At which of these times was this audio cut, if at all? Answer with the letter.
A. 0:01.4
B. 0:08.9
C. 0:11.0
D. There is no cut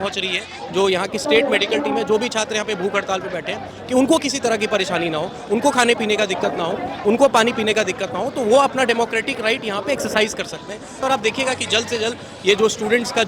C